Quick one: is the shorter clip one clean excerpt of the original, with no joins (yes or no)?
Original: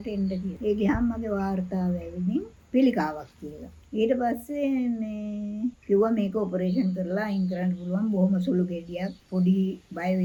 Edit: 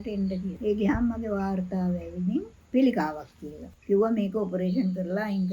no